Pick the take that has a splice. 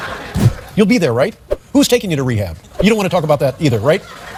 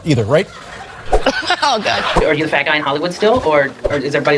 second; 1 cut; at 2.2 s

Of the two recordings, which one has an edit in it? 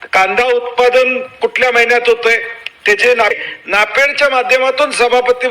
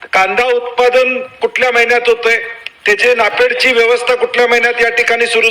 first; 1 cut; at 3.3 s

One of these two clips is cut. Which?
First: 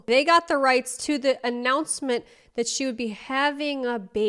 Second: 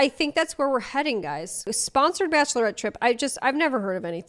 second; 1 cut; at 1.5 s

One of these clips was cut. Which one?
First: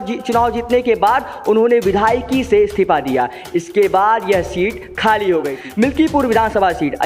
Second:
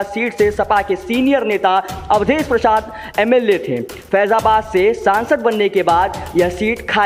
first; 1 cut; at 5.6 s

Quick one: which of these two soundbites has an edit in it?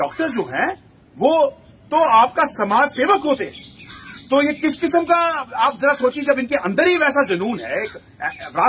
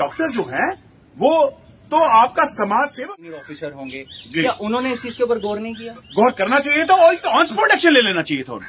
second; 1 cut; at 2.9 s

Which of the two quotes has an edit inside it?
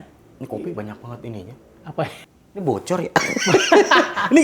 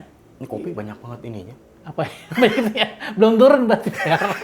first; 1 cut; at 2.2 s

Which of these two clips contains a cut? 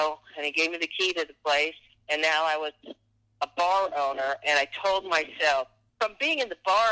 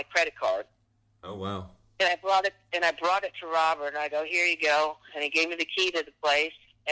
first; 1 cut; at 5.8 s

